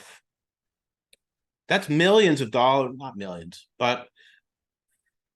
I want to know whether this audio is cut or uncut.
uncut